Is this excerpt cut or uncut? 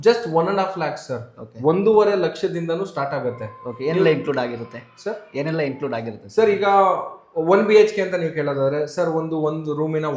uncut